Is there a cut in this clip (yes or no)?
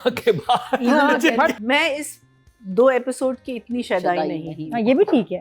yes